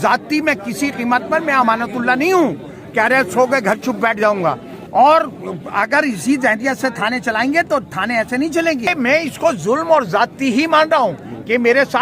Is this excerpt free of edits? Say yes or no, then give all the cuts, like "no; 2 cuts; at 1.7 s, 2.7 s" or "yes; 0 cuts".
no; 2 cuts; at 4.7 s, 8.9 s